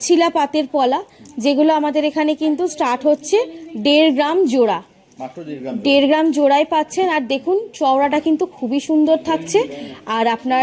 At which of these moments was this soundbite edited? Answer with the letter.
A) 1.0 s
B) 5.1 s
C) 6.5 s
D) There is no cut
D